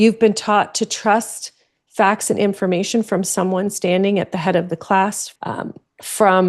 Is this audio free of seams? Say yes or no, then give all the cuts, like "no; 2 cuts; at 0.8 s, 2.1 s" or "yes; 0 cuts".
no; 1 cut; at 5.2 s